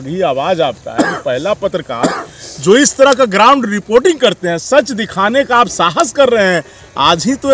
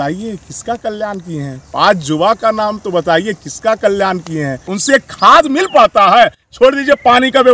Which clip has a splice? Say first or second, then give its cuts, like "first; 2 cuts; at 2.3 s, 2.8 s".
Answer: second; 1 cut; at 4.7 s